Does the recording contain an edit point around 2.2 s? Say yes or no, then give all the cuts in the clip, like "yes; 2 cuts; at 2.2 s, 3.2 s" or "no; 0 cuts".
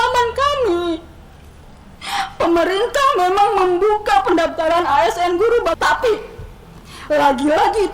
no; 1 cut; at 5.8 s